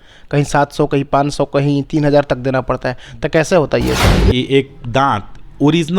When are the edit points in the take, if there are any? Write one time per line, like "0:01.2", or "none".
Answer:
0:04.2